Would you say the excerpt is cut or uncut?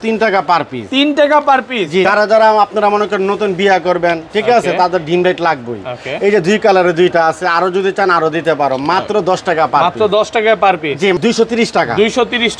cut